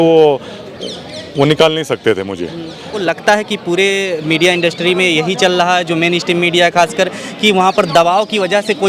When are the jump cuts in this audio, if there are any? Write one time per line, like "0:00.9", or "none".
0:02.9